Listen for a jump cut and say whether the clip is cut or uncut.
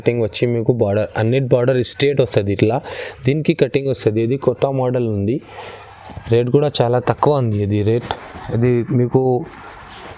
uncut